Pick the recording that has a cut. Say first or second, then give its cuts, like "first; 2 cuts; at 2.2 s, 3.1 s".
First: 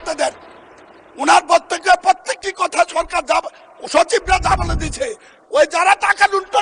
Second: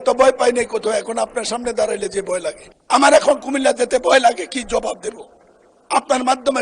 second; 1 cut; at 2.7 s